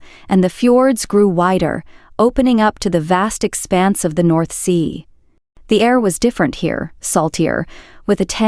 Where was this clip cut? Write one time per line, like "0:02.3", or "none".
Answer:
none